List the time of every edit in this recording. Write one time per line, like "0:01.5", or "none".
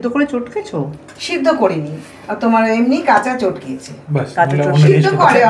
none